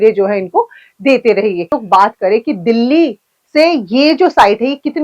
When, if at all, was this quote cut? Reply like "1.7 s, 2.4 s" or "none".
1.8 s